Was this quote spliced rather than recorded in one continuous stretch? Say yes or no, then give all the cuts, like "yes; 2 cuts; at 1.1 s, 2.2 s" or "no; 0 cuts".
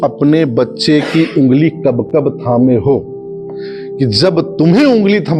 no; 0 cuts